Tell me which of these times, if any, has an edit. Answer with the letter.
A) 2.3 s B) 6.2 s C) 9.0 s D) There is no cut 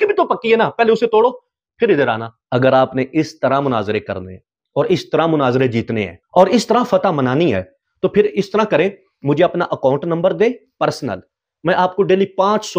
A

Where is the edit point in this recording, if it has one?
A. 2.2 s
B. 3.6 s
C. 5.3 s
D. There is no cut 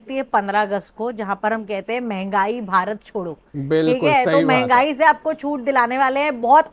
D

